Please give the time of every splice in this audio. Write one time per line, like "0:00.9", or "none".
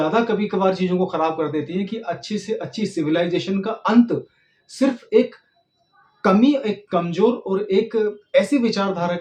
none